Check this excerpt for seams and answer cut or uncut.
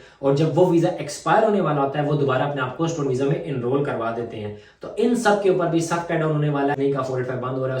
cut